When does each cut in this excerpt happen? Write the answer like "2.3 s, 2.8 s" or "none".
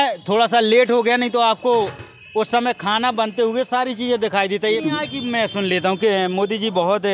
4.8 s

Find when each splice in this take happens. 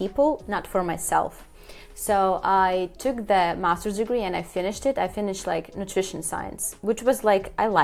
none

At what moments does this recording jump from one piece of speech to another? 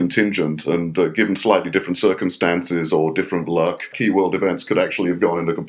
3.9 s

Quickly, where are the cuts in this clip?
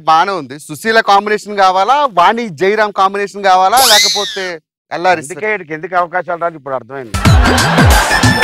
none

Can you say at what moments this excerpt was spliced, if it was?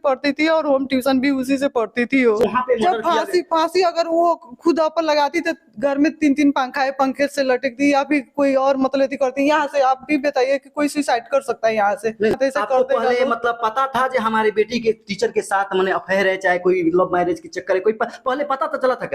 2.4 s, 12.4 s

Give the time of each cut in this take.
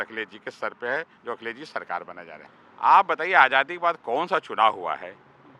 2.3 s

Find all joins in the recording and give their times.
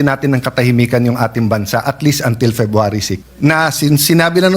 3.2 s

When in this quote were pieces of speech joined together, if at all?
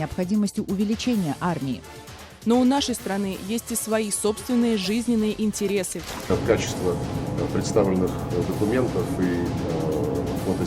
6.3 s

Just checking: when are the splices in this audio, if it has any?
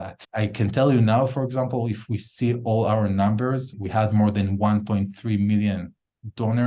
none

